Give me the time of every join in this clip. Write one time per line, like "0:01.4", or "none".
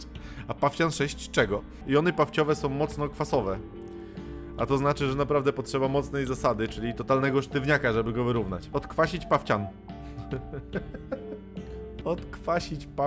0:01.8
0:08.6
0:12.0